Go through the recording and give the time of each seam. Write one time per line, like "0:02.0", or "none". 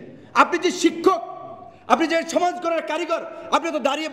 none